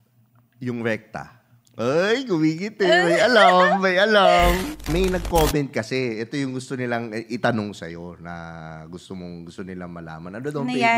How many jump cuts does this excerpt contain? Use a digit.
1